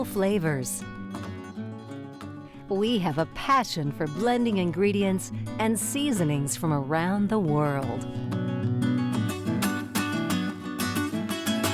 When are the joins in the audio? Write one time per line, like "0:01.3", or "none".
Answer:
none